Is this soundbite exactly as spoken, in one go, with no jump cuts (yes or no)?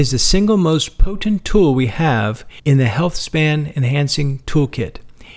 no